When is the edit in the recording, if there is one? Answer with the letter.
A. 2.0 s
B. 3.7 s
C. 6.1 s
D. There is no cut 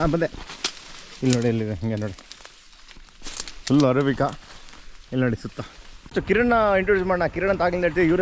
C